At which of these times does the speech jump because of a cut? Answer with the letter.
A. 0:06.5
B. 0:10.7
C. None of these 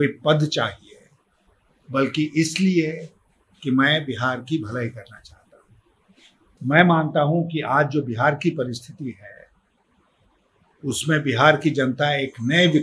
A